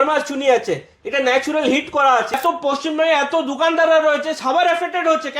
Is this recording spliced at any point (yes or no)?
yes